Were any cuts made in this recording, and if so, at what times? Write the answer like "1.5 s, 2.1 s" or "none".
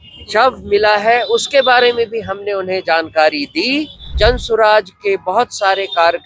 4.1 s